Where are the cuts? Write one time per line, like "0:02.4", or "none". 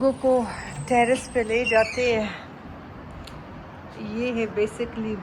none